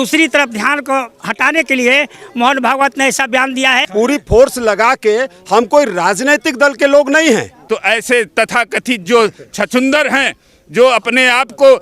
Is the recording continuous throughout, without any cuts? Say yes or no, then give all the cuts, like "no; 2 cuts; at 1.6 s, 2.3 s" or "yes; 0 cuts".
no; 2 cuts; at 3.8 s, 7.6 s